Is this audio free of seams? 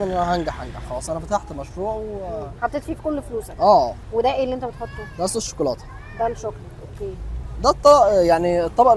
yes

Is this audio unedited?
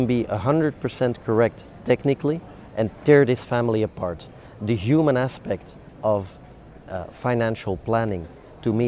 yes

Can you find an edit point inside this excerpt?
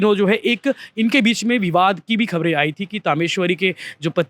no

